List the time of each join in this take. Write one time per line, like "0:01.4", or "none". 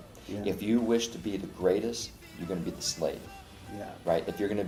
none